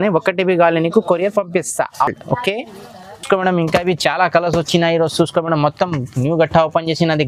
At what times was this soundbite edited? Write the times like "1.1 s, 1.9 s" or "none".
none